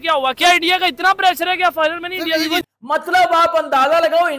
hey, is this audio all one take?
no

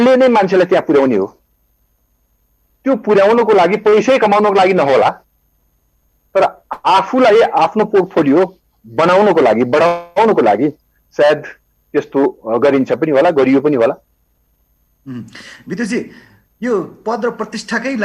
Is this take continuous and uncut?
yes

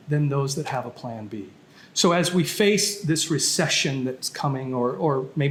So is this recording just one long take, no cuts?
yes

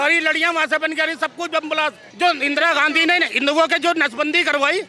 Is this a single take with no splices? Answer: no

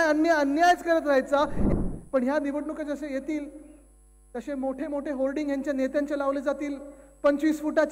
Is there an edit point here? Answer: yes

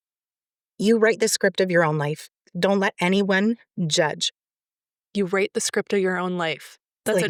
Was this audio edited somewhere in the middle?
no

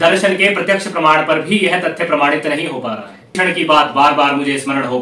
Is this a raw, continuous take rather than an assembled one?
no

